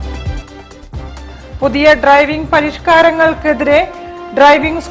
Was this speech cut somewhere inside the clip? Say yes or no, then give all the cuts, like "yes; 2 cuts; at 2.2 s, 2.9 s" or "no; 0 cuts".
yes; 1 cut; at 1.2 s